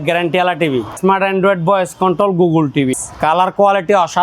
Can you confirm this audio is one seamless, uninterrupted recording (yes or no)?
no